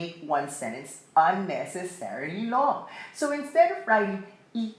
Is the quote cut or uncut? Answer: uncut